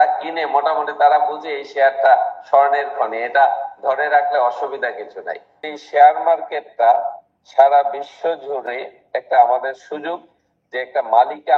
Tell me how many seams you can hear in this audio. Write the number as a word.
two